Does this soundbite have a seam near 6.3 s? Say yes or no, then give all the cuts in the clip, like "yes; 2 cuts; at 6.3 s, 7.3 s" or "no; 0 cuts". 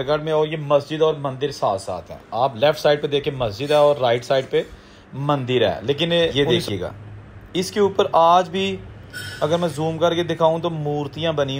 yes; 1 cut; at 6.3 s